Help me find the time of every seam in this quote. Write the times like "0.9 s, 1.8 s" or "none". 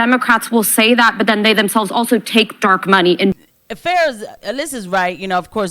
3.3 s